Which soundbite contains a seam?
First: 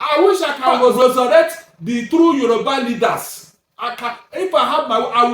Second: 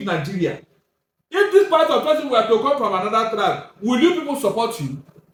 first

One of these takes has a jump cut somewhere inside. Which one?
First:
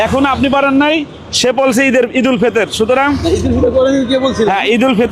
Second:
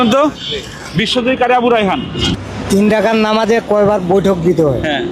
second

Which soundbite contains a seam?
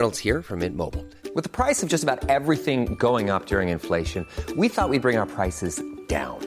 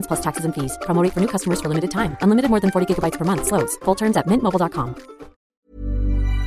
second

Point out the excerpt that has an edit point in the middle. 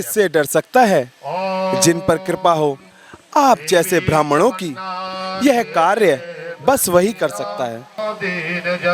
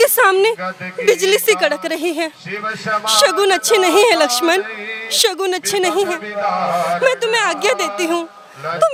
first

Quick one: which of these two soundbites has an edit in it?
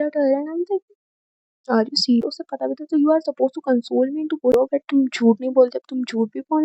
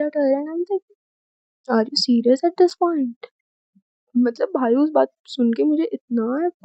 first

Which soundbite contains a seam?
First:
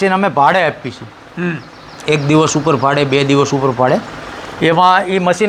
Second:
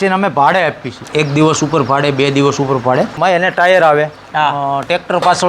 second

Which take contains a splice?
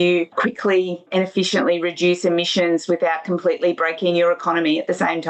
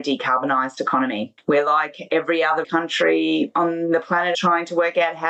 second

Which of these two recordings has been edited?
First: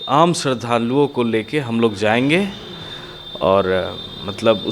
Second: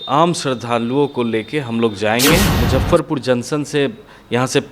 second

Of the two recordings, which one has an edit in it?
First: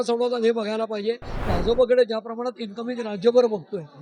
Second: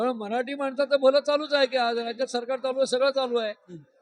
first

